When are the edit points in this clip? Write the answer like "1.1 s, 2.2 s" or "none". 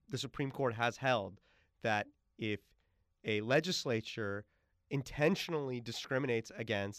none